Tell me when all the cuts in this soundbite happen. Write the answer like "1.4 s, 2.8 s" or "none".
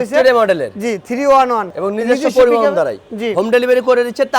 1.7 s